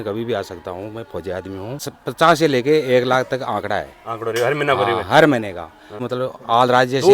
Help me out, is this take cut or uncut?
cut